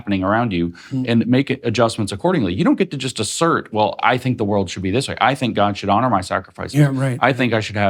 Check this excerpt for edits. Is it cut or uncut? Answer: uncut